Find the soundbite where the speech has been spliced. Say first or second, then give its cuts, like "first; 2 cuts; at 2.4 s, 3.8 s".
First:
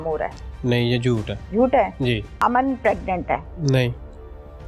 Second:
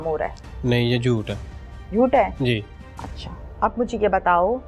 first; 3 cuts; at 1.4 s, 2.3 s, 3.5 s